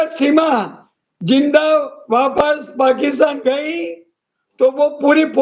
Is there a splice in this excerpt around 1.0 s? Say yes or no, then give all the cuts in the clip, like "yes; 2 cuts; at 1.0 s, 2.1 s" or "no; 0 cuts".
no; 0 cuts